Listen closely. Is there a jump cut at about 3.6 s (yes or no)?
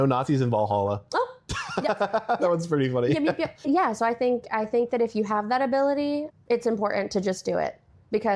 yes